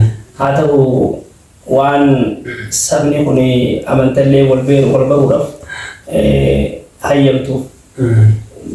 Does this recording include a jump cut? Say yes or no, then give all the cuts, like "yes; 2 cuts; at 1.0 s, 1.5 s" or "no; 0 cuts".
no; 0 cuts